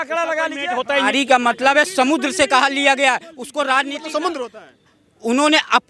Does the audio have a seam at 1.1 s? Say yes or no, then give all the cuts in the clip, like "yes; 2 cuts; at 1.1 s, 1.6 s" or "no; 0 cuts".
yes; 1 cut; at 1.1 s